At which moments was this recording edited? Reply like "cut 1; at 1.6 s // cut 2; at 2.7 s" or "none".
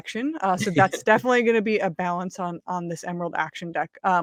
none